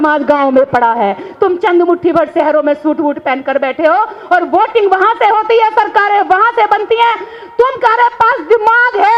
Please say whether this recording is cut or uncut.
uncut